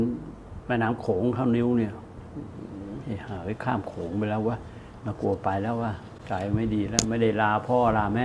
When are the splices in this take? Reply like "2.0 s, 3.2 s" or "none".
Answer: none